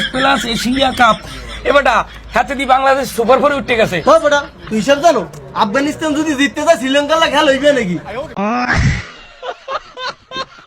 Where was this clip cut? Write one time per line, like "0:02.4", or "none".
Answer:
0:08.3